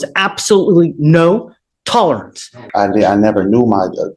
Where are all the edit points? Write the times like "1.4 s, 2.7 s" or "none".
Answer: 2.6 s